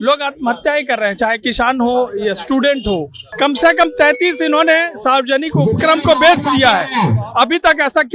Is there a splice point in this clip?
yes; 1 cut; at 3.2 s

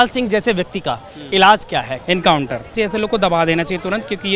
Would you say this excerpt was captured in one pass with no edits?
no; 2 cuts; at 1.9 s, 2.7 s

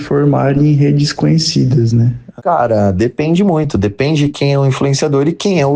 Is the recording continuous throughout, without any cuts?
no; 1 cut; at 2.2 s

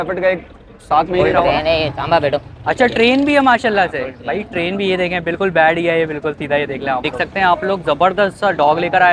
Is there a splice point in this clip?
yes; 2 cuts; at 1.2 s, 7.1 s

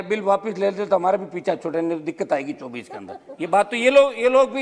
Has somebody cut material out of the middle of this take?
no; 0 cuts

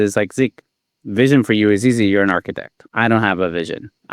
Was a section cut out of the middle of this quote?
yes; 1 cut; at 2.8 s

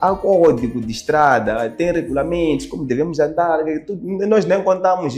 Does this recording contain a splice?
no; 0 cuts

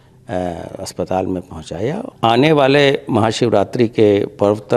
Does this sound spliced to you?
yes; 1 cut; at 2.1 s

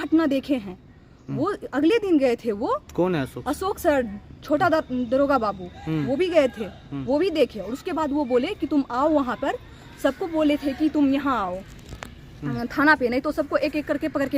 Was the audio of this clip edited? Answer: no; 0 cuts

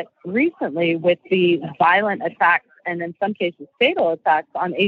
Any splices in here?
no; 0 cuts

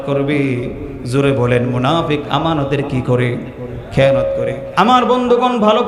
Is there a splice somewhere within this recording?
yes; 1 cut; at 4.9 s

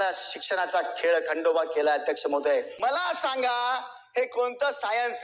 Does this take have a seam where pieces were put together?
yes; 1 cut; at 2.7 s

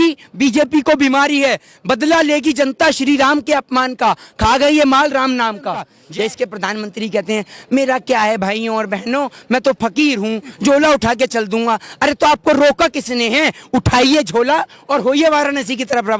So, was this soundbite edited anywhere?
yes; 1 cut; at 6.0 s

